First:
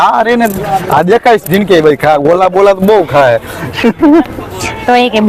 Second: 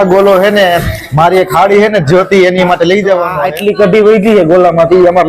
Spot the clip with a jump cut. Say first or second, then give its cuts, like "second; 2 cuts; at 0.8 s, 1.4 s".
second; 1 cut; at 3.4 s